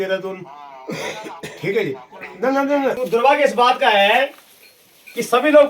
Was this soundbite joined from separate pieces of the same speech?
yes; 1 cut; at 3.0 s

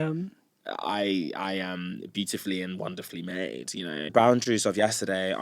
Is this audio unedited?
no; 1 cut; at 4.0 s

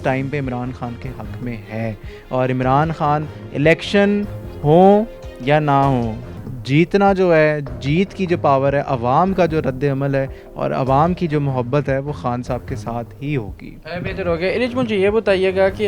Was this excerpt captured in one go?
yes; 0 cuts

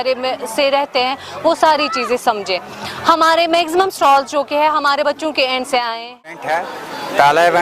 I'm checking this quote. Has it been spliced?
yes; 1 cut; at 6.4 s

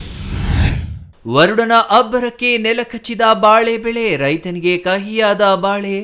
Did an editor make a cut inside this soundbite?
yes; 1 cut; at 1.0 s

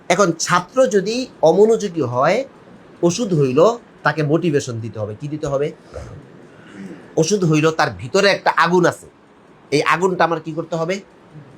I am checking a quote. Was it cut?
no; 0 cuts

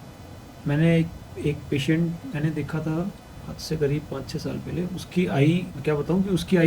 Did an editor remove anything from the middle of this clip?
yes; 1 cut; at 5.7 s

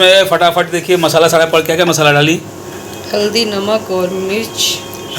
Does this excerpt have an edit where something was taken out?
no; 0 cuts

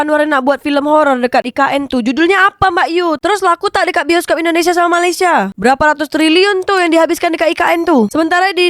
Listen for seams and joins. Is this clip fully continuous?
no; 1 cut; at 5.5 s

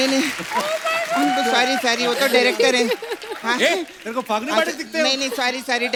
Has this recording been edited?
no; 0 cuts

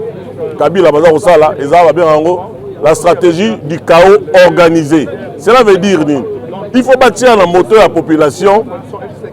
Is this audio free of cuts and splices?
yes; 0 cuts

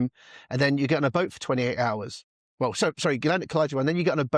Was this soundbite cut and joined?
no; 0 cuts

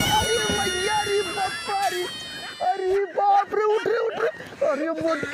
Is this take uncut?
yes; 0 cuts

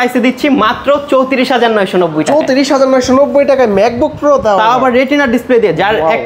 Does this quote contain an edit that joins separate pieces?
no; 0 cuts

